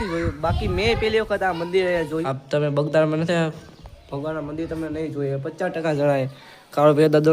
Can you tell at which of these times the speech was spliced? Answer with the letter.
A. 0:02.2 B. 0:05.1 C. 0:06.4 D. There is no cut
A